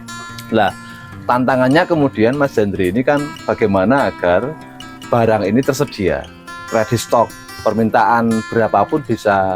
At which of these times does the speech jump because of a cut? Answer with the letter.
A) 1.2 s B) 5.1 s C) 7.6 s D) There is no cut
C